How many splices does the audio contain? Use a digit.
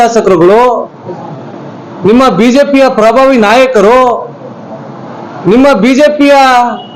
0